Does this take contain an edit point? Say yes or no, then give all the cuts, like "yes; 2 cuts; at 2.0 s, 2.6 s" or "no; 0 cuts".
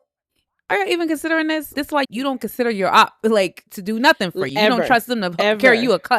yes; 2 cuts; at 1.8 s, 3.7 s